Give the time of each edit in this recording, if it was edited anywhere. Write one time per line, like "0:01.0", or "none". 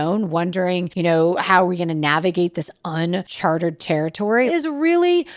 0:00.9
0:03.3
0:04.5